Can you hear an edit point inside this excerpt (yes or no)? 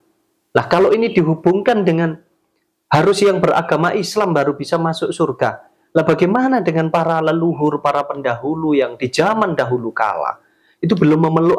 no